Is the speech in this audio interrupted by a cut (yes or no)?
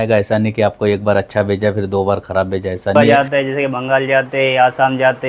yes